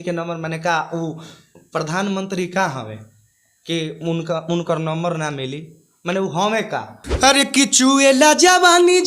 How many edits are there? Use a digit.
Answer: 1